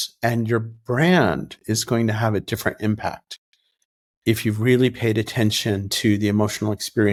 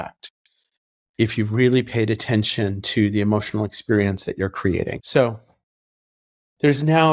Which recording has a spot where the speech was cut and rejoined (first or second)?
second